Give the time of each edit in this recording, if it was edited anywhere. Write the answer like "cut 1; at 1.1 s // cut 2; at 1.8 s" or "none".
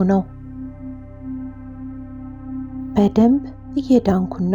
none